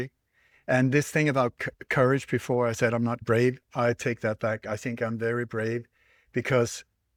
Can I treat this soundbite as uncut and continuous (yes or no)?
yes